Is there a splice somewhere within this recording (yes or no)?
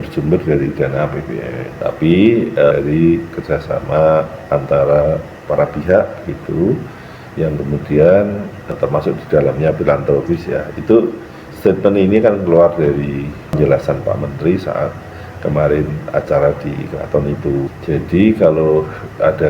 yes